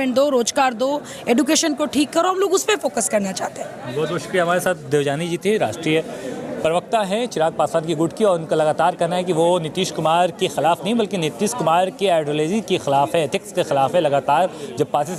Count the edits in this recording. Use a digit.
0